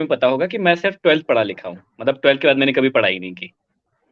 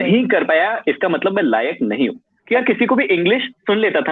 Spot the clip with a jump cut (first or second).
second